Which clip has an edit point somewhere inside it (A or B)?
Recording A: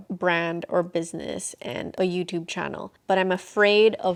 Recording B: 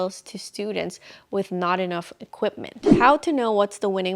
B